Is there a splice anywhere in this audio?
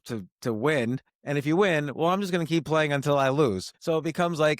yes; 2 cuts; at 1.1 s, 3.7 s

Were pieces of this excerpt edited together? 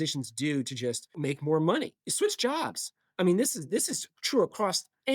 yes; 2 cuts; at 1.2 s, 2.0 s

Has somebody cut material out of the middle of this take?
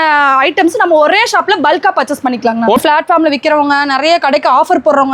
yes; 1 cut; at 2.8 s

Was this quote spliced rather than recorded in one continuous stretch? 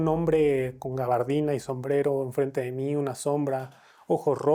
no; 0 cuts

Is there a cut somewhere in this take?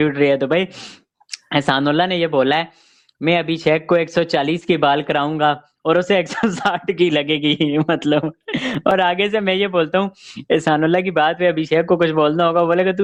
no; 0 cuts

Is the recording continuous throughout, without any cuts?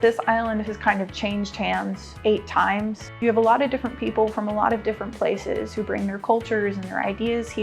no; 2 cuts; at 2.1 s, 3.1 s

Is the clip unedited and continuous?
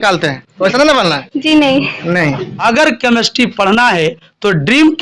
no; 1 cut; at 2.5 s

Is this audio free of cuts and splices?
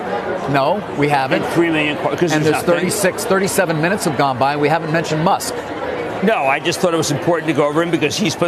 yes; 0 cuts

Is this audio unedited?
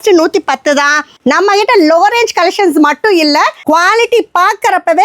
no; 2 cuts; at 1.1 s, 3.6 s

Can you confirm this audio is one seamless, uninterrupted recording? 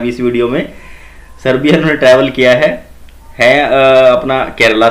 yes; 0 cuts

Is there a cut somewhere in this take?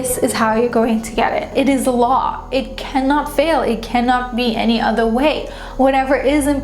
yes; 1 cut; at 1.5 s

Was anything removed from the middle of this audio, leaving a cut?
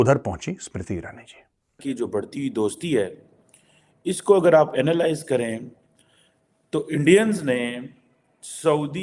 yes; 1 cut; at 1.8 s

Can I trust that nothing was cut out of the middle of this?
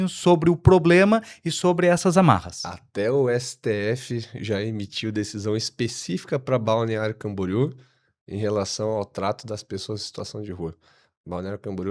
yes; 0 cuts

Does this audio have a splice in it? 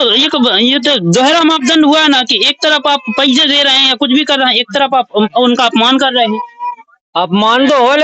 no; 0 cuts

